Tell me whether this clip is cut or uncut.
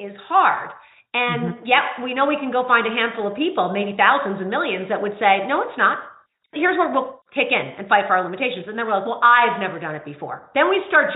cut